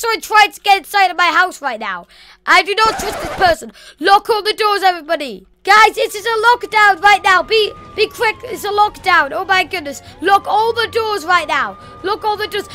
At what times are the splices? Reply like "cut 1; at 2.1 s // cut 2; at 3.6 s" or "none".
none